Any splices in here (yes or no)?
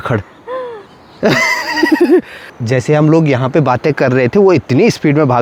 no